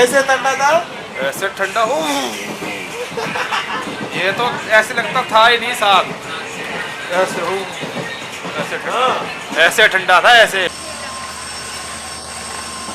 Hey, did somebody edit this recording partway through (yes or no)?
yes